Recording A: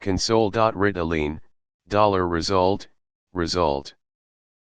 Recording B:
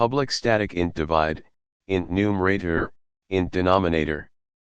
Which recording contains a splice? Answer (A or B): A